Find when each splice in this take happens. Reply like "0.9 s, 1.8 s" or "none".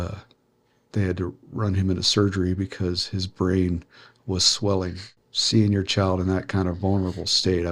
5.1 s